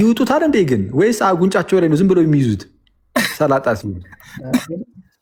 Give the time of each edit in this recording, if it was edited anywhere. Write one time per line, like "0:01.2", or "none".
none

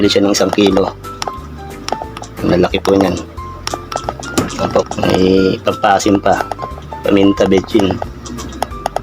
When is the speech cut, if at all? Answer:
0:04.8

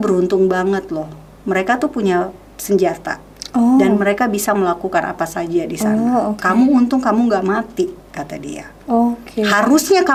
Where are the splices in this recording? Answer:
none

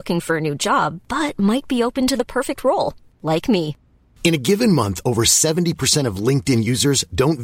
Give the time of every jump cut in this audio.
none

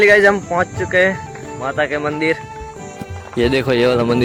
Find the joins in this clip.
none

